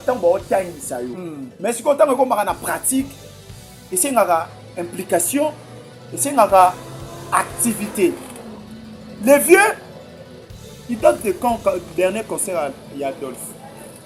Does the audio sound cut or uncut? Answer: uncut